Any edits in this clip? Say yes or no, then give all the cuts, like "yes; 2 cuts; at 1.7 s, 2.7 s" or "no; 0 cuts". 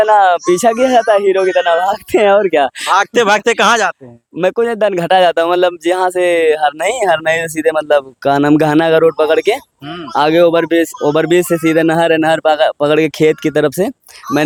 no; 0 cuts